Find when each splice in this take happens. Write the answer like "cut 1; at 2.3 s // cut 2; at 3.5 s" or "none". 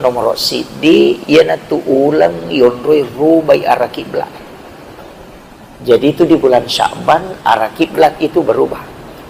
none